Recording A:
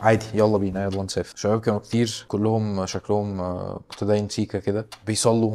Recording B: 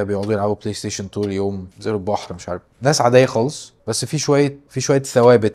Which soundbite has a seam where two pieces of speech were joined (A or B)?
A